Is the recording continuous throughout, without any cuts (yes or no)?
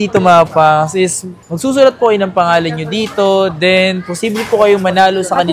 yes